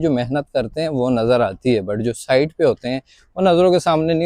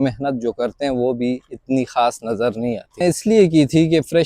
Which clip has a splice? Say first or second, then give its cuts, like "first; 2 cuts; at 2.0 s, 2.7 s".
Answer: second; 1 cut; at 2.8 s